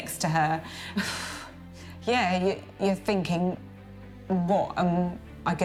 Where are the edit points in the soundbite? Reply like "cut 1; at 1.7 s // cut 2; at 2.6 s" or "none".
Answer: none